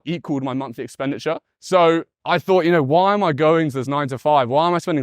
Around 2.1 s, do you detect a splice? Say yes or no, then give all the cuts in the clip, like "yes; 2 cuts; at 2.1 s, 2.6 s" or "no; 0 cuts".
yes; 2 cuts; at 1.5 s, 2.1 s